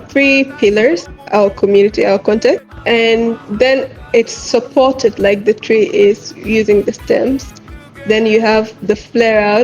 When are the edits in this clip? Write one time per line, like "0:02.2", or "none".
0:01.1
0:02.7